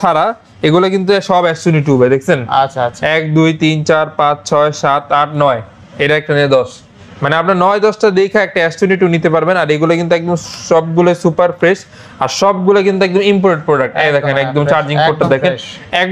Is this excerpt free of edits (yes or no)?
yes